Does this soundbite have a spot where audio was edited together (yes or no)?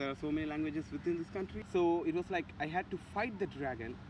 yes